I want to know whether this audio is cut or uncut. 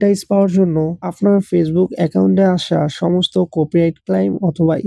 cut